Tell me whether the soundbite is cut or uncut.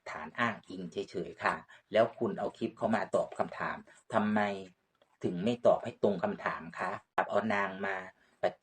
cut